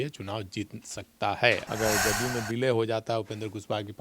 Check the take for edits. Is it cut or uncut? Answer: cut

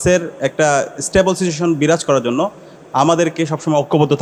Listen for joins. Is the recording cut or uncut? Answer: uncut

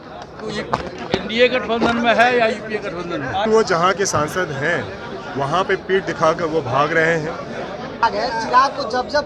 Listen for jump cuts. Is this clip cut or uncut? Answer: cut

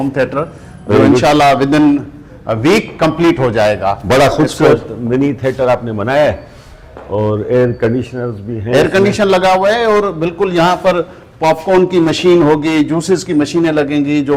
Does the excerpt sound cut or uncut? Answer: uncut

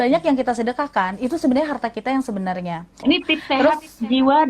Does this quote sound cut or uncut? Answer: cut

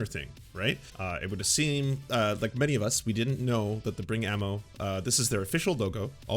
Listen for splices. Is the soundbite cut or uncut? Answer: cut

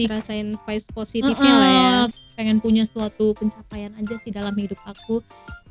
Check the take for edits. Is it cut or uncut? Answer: cut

